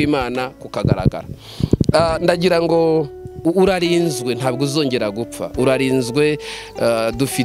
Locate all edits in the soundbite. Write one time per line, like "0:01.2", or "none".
0:03.3